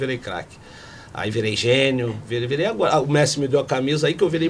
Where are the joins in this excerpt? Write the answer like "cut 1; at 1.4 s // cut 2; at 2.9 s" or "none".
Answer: none